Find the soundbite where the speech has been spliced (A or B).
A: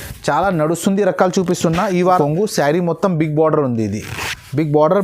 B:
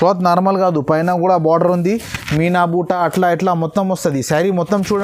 A